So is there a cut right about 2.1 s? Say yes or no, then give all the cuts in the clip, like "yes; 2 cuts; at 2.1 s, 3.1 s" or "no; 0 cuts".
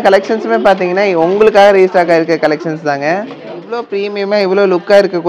no; 1 cut; at 3.7 s